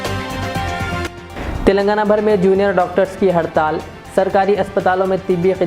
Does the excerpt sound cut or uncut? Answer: cut